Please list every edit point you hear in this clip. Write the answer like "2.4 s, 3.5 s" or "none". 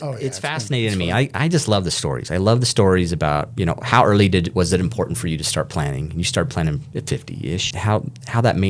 7.7 s